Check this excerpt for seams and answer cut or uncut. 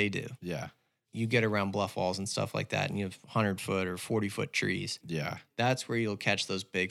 cut